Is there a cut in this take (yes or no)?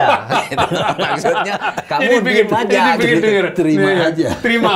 no